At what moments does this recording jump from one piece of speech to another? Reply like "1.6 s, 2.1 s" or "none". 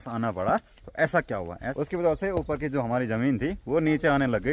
1.6 s